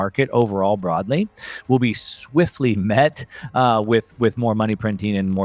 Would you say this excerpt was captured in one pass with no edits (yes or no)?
yes